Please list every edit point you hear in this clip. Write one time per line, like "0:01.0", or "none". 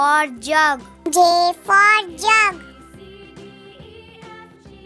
0:02.6